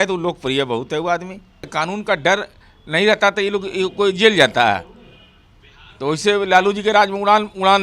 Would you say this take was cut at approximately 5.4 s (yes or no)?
no